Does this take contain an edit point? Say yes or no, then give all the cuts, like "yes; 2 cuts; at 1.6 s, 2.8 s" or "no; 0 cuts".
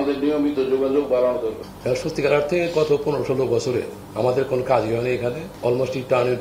yes; 3 cuts; at 1.7 s, 4.0 s, 5.5 s